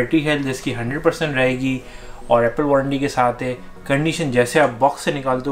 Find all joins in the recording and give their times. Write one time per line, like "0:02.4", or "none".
none